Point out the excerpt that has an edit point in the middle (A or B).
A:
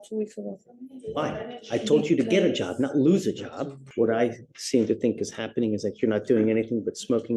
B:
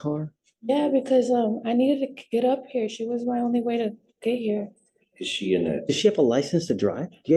A